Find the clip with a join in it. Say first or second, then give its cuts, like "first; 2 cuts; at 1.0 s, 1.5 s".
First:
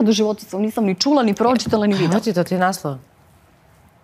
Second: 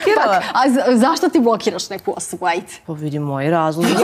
second; 1 cut; at 2.8 s